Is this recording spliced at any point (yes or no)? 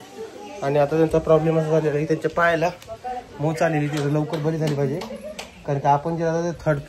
no